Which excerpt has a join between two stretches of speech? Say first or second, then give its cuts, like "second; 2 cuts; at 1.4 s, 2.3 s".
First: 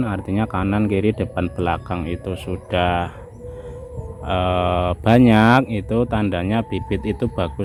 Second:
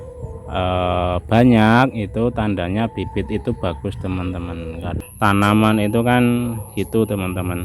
second; 1 cut; at 4.9 s